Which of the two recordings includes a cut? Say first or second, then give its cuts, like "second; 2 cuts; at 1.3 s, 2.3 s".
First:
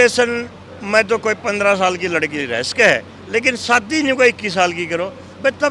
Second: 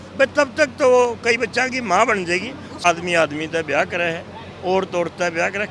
second; 1 cut; at 2.8 s